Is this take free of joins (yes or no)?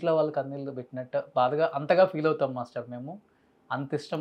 yes